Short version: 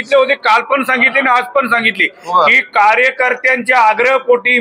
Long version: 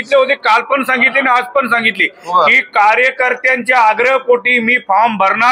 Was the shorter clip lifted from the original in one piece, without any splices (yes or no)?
yes